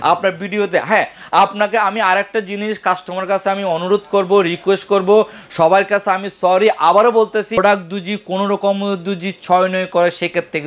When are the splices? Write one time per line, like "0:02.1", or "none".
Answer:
0:07.5